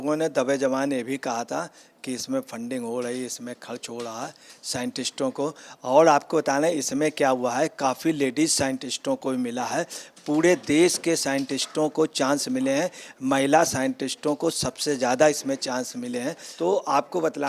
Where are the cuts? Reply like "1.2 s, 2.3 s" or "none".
16.4 s